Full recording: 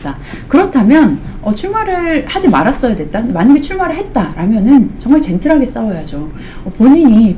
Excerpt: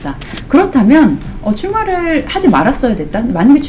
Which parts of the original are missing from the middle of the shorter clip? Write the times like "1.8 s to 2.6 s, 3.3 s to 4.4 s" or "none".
none